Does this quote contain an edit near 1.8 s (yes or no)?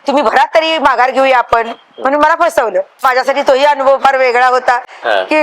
no